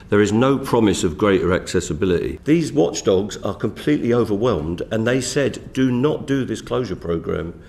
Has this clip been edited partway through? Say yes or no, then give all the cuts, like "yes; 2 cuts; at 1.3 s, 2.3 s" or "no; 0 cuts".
yes; 1 cut; at 2.3 s